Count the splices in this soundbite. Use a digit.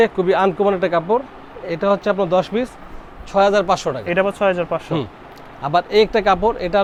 0